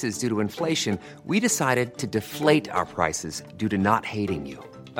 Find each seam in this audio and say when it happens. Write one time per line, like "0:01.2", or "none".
none

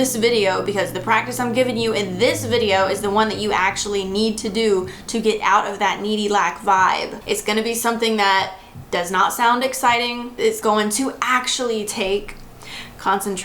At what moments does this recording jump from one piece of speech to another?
0:07.1
0:10.5

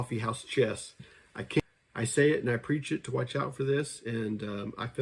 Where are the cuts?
0:01.6

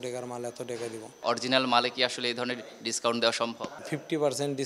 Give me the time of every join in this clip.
0:01.2
0:03.7

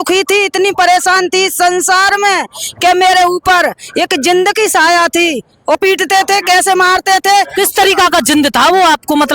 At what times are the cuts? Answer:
0:05.8

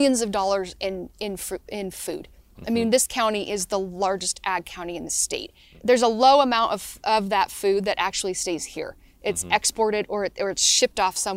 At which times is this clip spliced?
0:05.6

